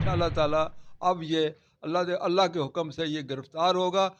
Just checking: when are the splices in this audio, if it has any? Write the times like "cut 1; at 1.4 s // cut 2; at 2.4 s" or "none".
none